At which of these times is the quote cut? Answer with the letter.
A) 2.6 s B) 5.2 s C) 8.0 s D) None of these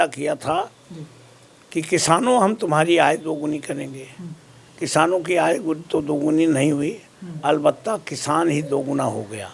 D